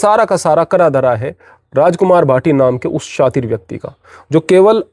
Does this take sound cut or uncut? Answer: uncut